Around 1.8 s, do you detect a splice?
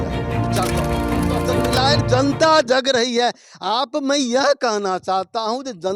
yes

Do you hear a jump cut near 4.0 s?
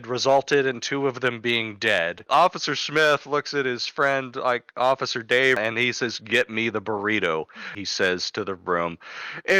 no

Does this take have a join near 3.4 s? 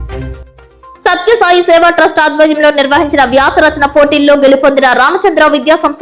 no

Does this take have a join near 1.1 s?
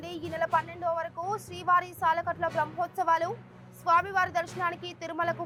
no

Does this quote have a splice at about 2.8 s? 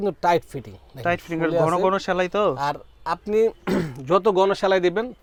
no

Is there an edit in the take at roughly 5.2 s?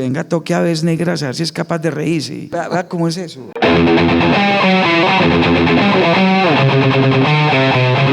no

